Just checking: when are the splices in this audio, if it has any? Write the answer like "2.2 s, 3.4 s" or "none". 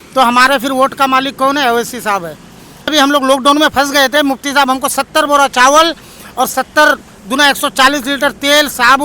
2.9 s